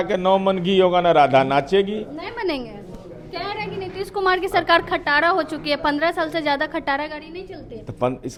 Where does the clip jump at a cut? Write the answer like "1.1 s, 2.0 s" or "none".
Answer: none